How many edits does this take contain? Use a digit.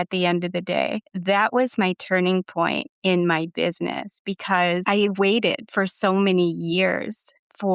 2